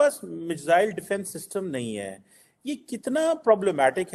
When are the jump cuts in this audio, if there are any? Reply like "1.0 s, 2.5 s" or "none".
none